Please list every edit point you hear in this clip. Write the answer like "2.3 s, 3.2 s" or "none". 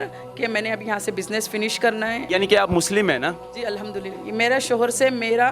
2.2 s, 4.2 s